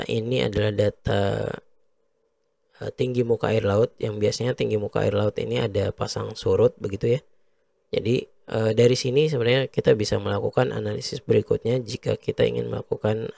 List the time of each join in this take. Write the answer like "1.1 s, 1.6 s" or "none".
none